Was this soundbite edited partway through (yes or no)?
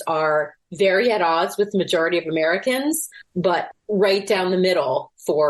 no